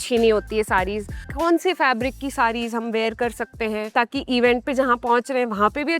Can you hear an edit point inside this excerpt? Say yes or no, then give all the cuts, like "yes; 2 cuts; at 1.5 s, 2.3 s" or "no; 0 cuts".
yes; 2 cuts; at 1.2 s, 3.9 s